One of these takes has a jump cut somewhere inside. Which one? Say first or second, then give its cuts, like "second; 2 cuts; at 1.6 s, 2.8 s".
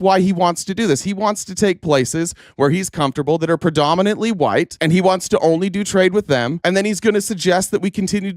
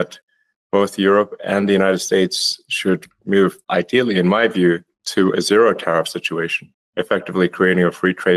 first; 2 cuts; at 4.7 s, 6.5 s